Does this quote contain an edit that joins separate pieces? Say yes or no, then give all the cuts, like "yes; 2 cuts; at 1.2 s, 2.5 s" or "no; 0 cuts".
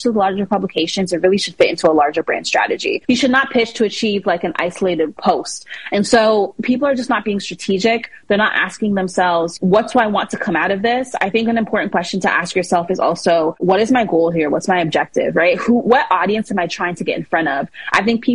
yes; 3 cuts; at 3.0 s, 5.2 s, 9.5 s